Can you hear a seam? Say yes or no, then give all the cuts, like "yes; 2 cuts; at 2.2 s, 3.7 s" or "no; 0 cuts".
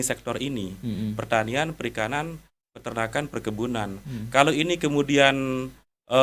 no; 0 cuts